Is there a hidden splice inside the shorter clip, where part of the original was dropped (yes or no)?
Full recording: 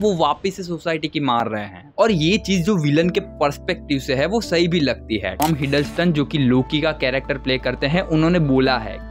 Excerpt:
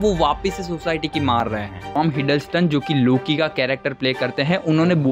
yes